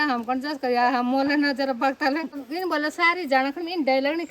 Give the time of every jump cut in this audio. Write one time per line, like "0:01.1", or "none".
0:02.3